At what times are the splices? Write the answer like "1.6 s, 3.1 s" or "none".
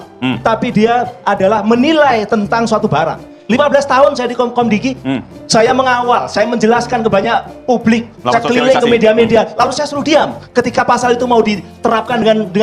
3.5 s